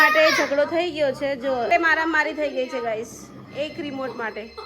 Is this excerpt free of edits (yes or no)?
no